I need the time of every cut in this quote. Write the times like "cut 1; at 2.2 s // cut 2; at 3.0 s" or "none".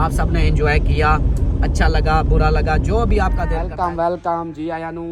cut 1; at 3.6 s